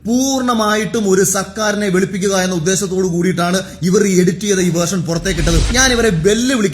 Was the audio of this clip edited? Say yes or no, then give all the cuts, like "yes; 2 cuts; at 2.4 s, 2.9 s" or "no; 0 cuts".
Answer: yes; 1 cut; at 5.7 s